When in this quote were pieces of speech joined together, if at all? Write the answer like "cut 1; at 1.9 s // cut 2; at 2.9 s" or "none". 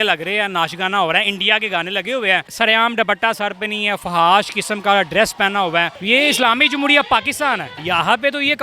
cut 1; at 2.5 s // cut 2; at 6.0 s // cut 3; at 7.7 s